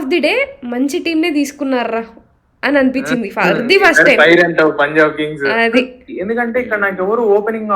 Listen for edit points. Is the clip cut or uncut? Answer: cut